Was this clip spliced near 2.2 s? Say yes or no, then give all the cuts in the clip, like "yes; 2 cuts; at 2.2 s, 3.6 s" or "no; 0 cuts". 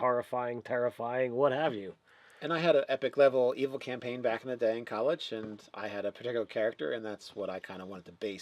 yes; 1 cut; at 2.2 s